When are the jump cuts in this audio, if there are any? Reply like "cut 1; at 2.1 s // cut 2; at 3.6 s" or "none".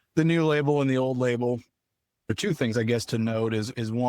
cut 1; at 2.4 s